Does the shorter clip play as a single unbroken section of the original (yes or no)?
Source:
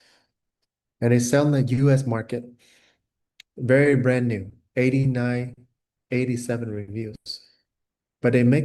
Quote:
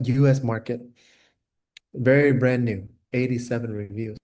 no